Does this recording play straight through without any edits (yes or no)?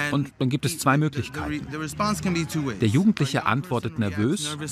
yes